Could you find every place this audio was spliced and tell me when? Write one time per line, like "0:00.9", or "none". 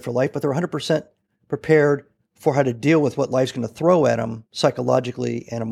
none